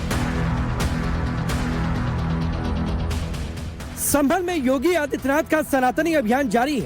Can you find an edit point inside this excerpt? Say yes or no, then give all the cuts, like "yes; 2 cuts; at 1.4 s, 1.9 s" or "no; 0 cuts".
yes; 1 cut; at 5.6 s